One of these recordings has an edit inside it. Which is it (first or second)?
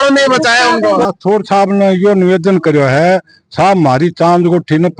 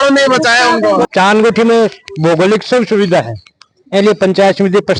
first